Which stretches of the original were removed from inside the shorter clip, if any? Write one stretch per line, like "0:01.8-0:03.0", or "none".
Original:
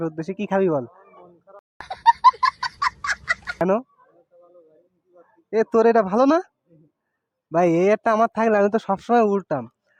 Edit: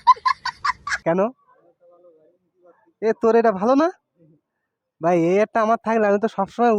0:03.1-0:03.4